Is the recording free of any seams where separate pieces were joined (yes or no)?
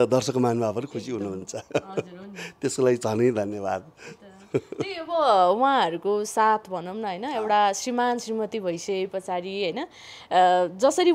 yes